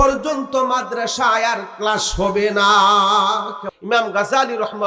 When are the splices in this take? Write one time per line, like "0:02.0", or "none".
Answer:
0:03.6